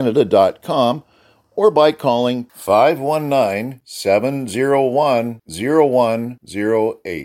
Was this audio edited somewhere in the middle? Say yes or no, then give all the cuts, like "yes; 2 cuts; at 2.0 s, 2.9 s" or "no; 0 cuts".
no; 0 cuts